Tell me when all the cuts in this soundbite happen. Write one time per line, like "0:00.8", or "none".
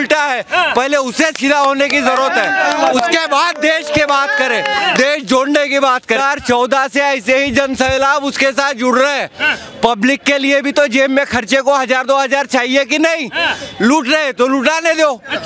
0:06.2